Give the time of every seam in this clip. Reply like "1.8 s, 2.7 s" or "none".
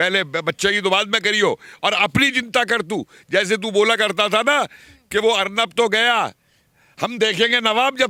none